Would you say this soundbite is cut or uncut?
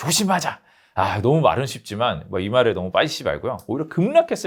uncut